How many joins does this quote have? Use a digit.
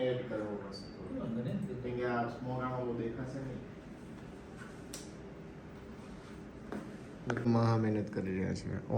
1